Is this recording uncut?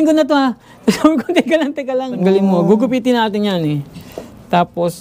no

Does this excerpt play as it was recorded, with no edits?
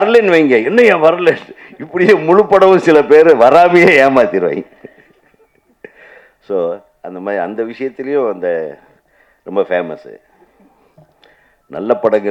yes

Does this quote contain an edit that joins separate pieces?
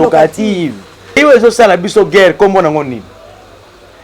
yes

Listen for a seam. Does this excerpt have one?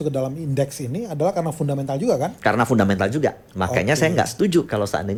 no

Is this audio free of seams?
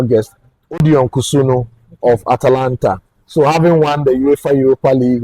yes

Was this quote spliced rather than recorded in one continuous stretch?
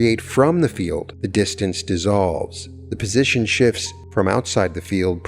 yes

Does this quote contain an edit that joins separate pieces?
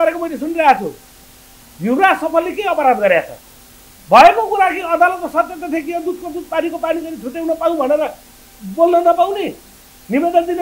no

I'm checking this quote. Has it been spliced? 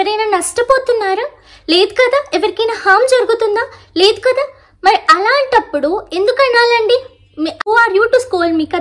yes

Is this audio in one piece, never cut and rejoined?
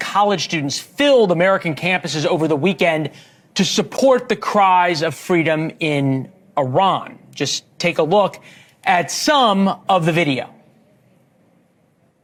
yes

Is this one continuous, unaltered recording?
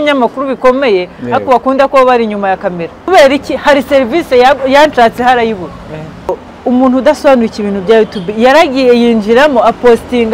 no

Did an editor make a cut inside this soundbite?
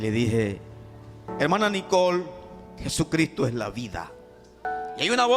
yes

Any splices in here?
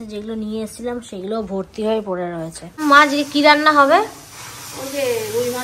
yes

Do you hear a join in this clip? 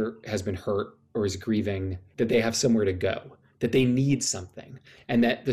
yes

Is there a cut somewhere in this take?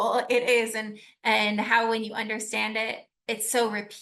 yes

